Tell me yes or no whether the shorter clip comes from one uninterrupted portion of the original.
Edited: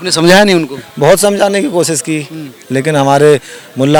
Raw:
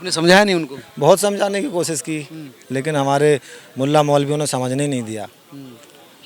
yes